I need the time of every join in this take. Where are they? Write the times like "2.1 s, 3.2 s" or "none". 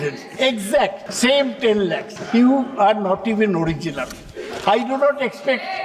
1.0 s, 2.1 s